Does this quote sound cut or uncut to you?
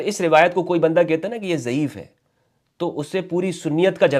uncut